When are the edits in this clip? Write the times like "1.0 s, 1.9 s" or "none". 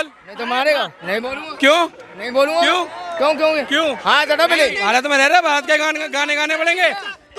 1.0 s, 4.9 s